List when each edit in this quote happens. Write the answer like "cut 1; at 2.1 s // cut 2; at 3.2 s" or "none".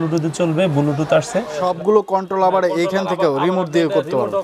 cut 1; at 1.6 s